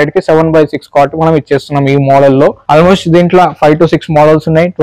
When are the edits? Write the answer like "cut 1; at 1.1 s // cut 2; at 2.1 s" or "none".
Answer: cut 1; at 2.6 s